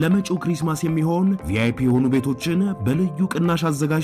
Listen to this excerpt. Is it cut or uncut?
uncut